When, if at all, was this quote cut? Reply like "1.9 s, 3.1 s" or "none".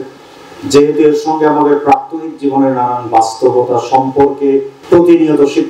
4.7 s